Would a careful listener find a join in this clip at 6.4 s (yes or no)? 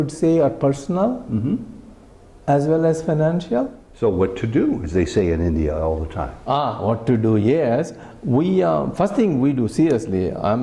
no